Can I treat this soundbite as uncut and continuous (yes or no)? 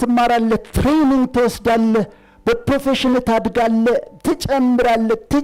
yes